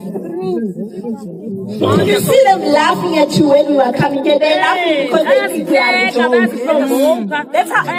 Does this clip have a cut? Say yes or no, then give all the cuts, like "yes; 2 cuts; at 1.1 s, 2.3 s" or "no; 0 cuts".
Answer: no; 0 cuts